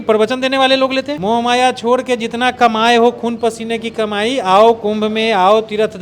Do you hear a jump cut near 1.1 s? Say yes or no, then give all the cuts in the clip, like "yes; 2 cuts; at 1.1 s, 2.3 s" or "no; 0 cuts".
yes; 1 cut; at 1.1 s